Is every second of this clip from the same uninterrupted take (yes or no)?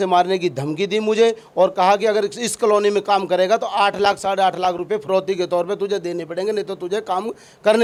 yes